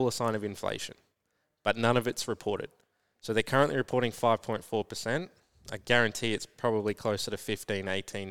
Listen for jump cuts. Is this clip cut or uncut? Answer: uncut